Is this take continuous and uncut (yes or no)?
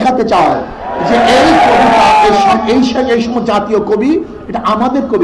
yes